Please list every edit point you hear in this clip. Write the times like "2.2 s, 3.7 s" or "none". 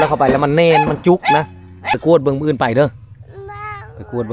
2.0 s